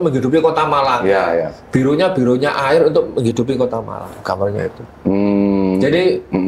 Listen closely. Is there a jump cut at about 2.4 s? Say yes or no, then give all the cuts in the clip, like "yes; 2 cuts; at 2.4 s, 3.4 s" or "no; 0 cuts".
no; 0 cuts